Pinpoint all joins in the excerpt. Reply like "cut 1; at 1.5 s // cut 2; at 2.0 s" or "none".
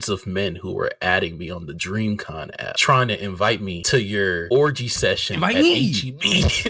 none